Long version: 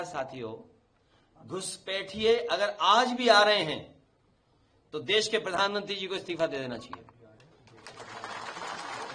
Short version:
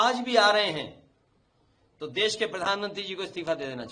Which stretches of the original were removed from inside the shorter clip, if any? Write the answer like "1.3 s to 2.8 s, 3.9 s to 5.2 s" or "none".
none